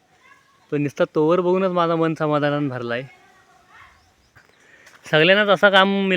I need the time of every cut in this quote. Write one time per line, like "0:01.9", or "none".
0:04.3

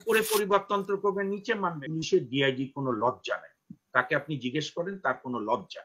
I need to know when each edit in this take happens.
0:01.8

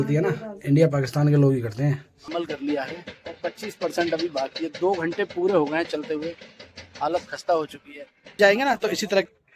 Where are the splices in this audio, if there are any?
0:02.2
0:08.3

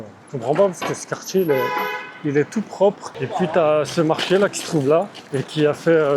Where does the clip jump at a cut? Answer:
0:03.1

